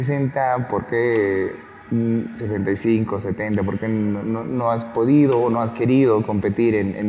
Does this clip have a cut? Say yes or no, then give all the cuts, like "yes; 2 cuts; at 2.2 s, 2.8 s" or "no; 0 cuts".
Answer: no; 0 cuts